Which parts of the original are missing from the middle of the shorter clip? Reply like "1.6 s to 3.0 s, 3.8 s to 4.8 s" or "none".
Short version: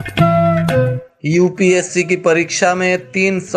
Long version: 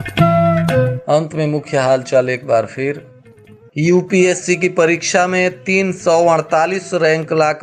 1.0 s to 3.5 s